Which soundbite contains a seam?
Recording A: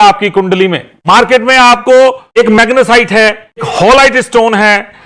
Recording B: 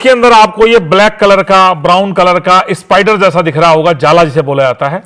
A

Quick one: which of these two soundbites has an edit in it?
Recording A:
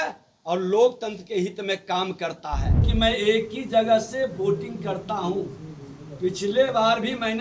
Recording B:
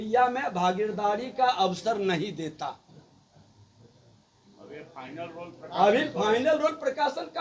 A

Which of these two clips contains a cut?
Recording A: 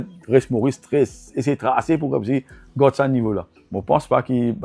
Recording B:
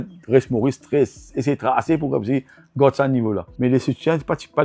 A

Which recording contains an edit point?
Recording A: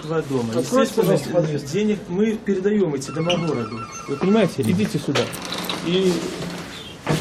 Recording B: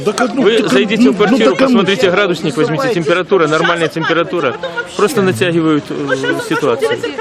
B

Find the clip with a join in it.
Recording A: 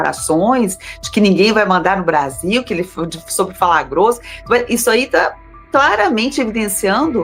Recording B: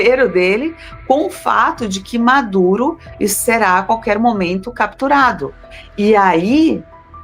B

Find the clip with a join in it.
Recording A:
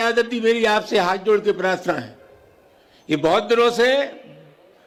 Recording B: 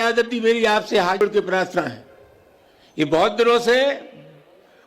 B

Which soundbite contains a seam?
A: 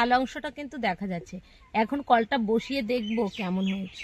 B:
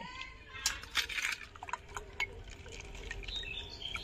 B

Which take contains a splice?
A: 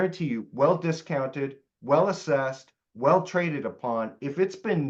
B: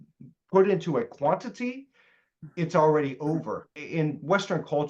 B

